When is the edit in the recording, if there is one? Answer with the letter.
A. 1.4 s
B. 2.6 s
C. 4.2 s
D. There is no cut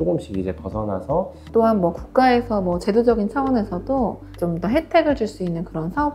A